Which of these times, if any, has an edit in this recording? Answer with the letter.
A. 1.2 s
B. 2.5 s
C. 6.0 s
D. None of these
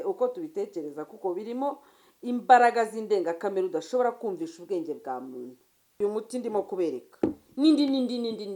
C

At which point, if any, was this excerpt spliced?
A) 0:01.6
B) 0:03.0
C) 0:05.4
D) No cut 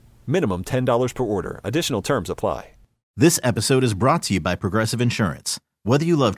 B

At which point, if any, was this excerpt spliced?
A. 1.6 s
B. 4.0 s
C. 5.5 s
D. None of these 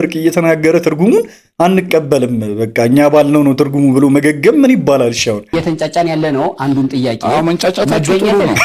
C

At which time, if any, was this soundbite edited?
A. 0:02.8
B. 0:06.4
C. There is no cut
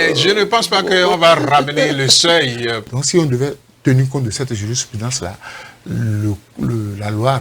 A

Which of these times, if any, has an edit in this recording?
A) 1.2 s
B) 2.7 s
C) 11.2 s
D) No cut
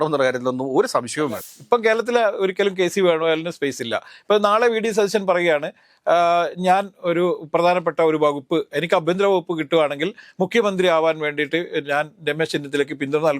A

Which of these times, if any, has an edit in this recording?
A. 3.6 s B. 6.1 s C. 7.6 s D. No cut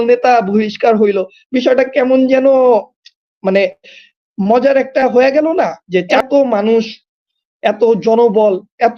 B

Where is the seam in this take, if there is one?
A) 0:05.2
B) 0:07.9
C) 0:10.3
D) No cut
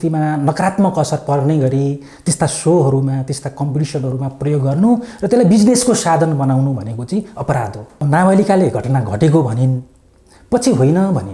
B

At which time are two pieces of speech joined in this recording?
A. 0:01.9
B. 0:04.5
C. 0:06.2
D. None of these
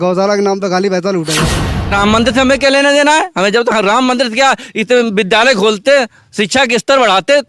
A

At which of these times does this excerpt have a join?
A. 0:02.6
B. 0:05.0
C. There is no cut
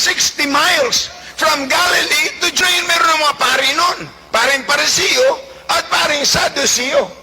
A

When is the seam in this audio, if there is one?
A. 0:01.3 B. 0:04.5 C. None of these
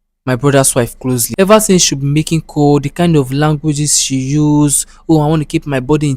A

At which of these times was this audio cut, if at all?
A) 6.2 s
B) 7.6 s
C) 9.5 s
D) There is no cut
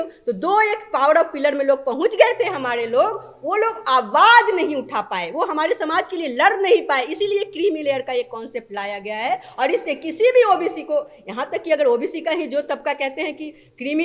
D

